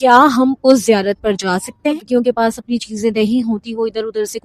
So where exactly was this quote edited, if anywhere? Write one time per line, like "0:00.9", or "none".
0:02.0